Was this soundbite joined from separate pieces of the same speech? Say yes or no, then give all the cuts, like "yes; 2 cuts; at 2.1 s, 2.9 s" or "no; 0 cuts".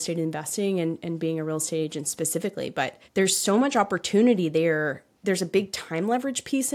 yes; 2 cuts; at 3.0 s, 5.1 s